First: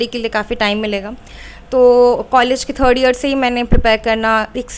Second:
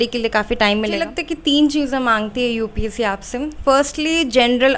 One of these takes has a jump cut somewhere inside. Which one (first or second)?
second